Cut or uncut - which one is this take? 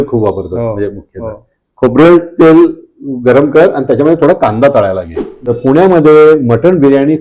cut